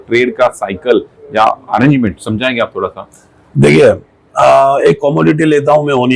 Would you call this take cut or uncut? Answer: uncut